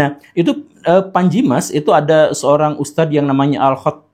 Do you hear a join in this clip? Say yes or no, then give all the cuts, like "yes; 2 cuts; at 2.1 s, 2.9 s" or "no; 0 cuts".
no; 0 cuts